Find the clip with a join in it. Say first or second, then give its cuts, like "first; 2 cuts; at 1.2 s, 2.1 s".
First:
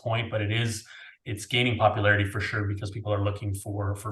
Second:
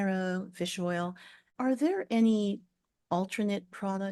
second; 1 cut; at 1.5 s